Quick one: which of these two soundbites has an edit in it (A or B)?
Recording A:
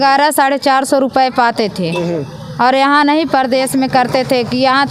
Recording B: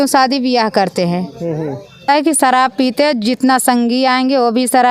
B